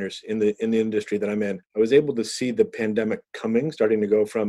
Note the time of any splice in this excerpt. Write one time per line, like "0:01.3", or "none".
0:01.6